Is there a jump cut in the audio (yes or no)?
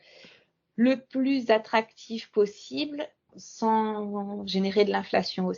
yes